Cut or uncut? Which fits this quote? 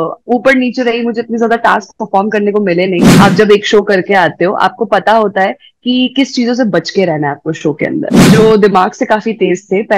cut